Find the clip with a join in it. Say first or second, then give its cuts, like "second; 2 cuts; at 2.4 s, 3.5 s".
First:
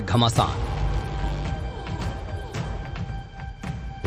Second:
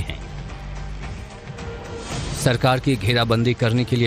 first; 1 cut; at 1.6 s